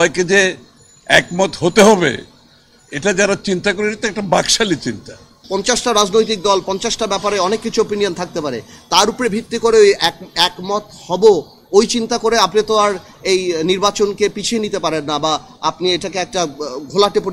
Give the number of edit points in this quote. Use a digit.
1